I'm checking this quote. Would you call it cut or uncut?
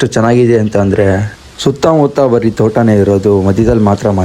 uncut